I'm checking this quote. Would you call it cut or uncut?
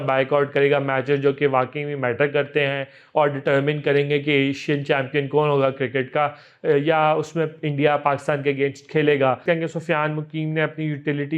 cut